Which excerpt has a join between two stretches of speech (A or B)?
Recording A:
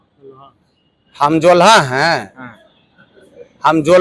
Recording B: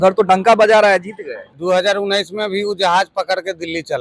B